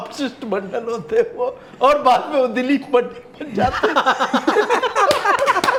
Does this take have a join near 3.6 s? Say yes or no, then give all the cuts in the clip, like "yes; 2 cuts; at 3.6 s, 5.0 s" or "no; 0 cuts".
no; 0 cuts